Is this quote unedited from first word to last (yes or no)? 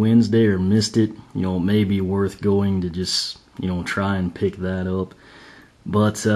no